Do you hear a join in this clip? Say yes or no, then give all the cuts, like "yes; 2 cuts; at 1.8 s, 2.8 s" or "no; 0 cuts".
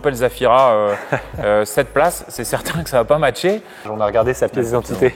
yes; 1 cut; at 3.9 s